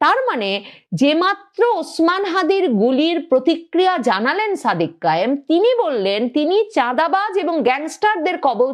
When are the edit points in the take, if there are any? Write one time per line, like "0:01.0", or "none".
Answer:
none